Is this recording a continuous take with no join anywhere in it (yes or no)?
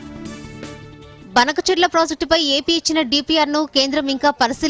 yes